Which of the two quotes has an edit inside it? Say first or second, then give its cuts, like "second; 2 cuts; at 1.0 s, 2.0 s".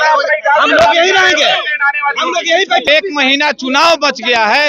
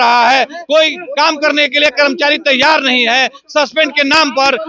first; 1 cut; at 2.9 s